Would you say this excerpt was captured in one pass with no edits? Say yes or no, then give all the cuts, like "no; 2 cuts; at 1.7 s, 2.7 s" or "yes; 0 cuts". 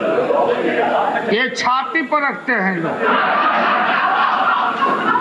yes; 0 cuts